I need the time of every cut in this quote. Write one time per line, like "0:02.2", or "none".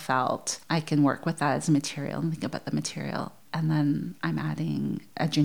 none

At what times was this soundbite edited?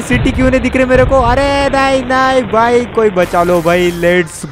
none

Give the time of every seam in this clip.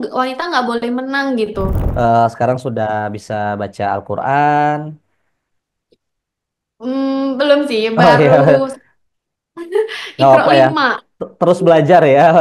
0:01.8

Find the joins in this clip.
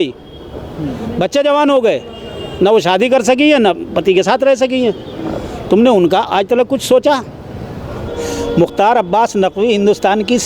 0:08.0

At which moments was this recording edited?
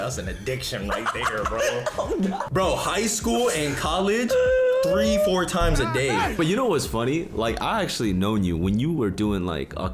0:02.4
0:06.4

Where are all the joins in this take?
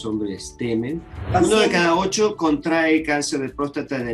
0:01.3

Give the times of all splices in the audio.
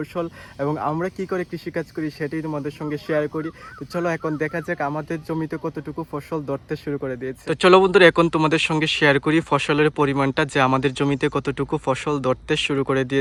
none

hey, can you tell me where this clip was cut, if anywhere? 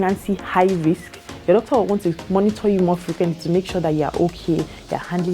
0:02.2

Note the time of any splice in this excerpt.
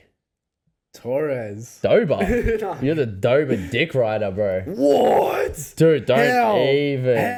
none

